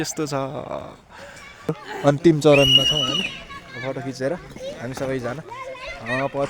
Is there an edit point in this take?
yes; 1 cut; at 1.9 s

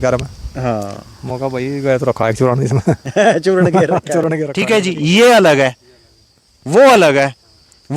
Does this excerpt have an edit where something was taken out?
yes; 1 cut; at 4.5 s

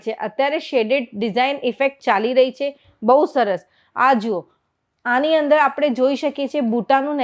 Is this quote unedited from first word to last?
yes; 0 cuts

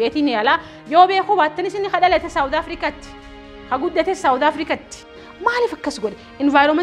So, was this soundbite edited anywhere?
yes; 1 cut; at 5.2 s

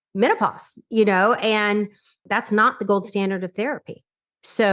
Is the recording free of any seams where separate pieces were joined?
no; 1 cut; at 2.2 s

